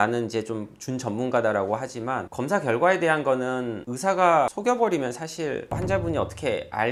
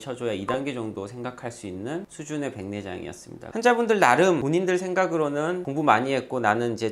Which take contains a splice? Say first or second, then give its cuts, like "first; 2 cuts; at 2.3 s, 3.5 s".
second; 1 cut; at 3.4 s